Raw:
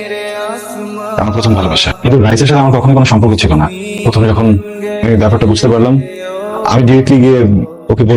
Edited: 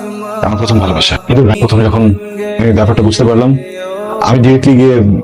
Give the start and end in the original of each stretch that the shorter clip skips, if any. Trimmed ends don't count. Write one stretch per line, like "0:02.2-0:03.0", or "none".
0:02.3-0:03.9